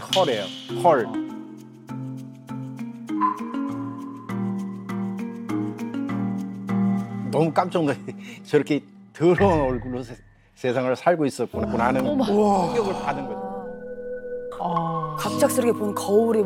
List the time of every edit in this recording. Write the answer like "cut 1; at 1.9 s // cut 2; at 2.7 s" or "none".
none